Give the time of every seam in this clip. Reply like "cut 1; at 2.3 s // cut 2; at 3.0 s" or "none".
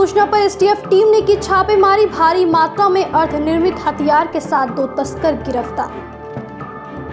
none

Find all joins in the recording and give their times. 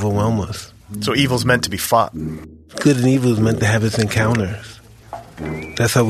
cut 1; at 0.9 s // cut 2; at 2.3 s

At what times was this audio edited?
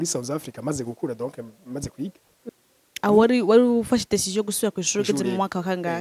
cut 1; at 2.4 s

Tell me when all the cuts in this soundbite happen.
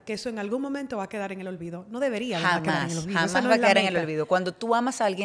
none

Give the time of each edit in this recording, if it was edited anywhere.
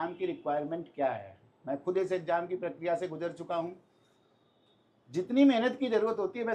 none

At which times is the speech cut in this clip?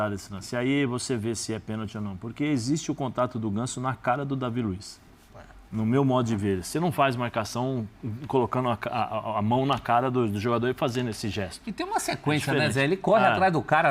none

